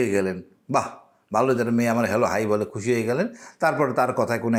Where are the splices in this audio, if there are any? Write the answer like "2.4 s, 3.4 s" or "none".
none